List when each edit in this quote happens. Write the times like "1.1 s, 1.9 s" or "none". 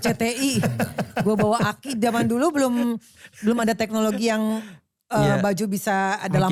none